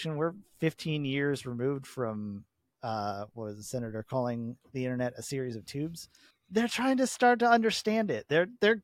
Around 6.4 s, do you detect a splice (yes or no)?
yes